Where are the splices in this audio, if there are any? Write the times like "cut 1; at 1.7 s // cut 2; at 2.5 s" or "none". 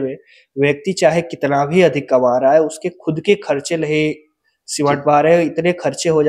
none